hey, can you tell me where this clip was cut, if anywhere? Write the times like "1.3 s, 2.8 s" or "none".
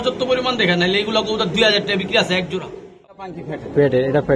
3.0 s